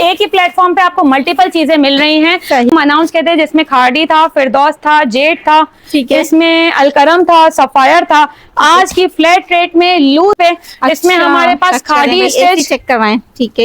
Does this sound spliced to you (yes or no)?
yes